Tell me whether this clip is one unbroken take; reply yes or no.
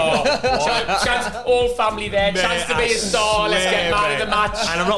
yes